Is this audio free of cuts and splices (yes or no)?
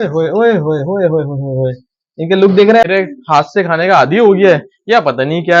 no